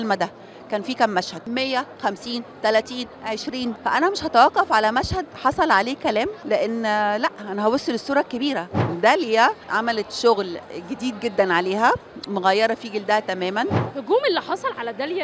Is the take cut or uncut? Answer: cut